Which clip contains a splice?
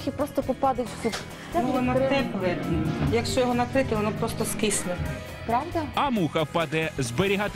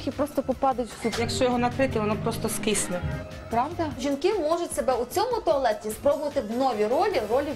second; 2 cuts; at 1.2 s, 4.0 s

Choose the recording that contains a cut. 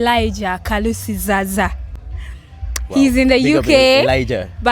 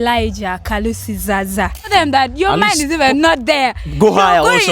second; 1 cut; at 1.9 s

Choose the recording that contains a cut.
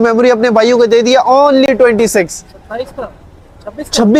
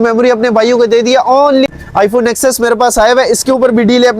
second; 1 cut; at 1.7 s

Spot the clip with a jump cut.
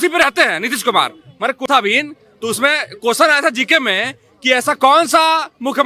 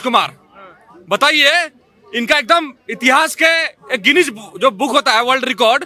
first; 1 cut; at 1.7 s

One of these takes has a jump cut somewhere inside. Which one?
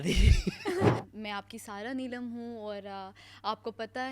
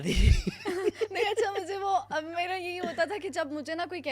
first; 1 cut; at 1.0 s

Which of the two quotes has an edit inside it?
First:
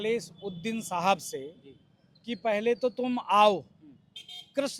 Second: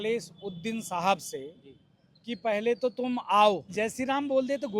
second; 1 cut; at 3.7 s

